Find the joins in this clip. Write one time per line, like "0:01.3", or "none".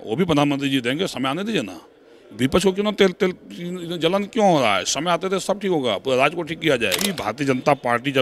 0:07.2